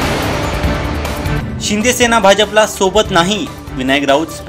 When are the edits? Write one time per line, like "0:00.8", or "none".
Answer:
0:01.4